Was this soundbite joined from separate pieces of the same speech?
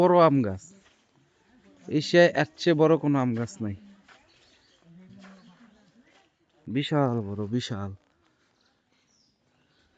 yes; 1 cut; at 6.9 s

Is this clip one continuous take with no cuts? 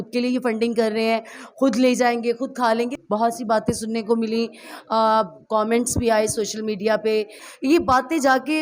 no; 2 cuts; at 3.0 s, 7.4 s

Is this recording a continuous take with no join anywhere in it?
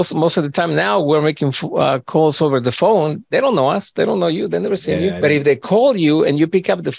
no; 1 cut; at 5.2 s

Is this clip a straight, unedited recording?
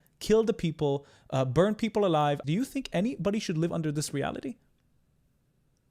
no; 1 cut; at 2.4 s

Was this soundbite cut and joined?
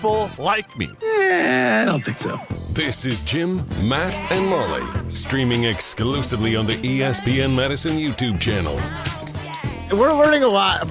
yes; 1 cut; at 9.8 s

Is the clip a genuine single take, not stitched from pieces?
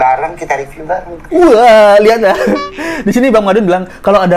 yes; 0 cuts

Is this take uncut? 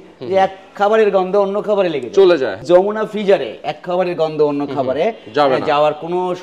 no; 1 cut; at 2.6 s

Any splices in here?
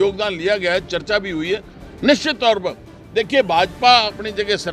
yes; 1 cut; at 1.8 s

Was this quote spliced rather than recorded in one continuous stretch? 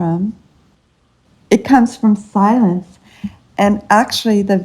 yes; 1 cut; at 1.0 s

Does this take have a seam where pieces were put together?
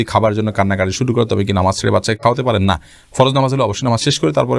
no; 0 cuts

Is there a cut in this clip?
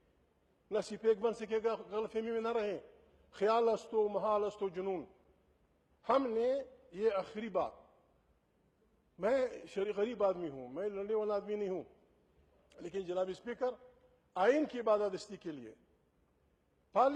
no; 0 cuts

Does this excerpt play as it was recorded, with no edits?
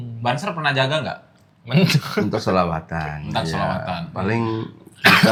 yes; 0 cuts

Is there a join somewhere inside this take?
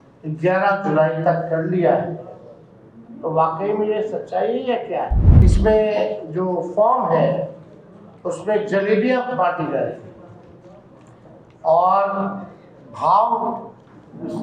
yes; 1 cut; at 5.2 s

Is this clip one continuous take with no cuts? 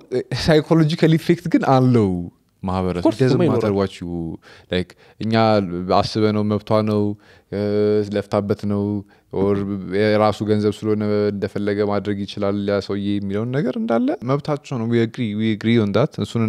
no; 1 cut; at 14.2 s

